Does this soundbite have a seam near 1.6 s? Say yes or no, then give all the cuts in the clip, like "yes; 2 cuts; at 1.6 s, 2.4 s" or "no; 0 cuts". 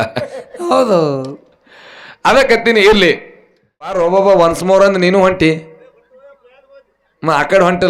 no; 1 cut; at 3.9 s